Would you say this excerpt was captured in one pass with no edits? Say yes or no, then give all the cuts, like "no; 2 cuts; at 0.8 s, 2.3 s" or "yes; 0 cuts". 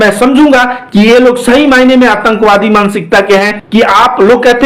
no; 1 cut; at 3.6 s